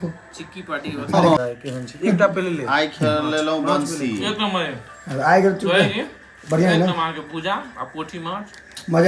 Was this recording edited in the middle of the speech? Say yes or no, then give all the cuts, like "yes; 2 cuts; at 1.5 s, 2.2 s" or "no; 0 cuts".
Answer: yes; 1 cut; at 1.4 s